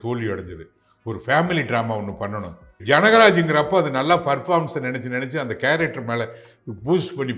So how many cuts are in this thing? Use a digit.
1